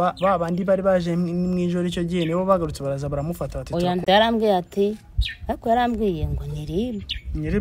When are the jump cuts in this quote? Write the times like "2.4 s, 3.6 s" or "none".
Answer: 4.0 s